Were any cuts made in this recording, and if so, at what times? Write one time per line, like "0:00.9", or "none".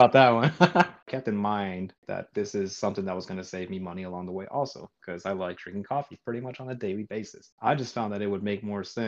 0:01.1
0:02.0
0:07.5